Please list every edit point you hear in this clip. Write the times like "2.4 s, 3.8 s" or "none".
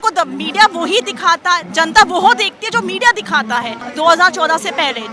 3.8 s